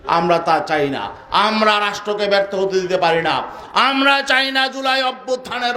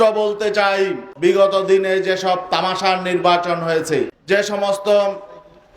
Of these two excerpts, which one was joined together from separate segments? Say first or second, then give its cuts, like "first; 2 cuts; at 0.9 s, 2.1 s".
second; 2 cuts; at 1.0 s, 4.2 s